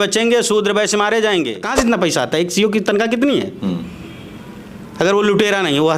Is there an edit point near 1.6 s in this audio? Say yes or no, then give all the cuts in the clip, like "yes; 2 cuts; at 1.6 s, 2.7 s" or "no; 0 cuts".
yes; 1 cut; at 1.6 s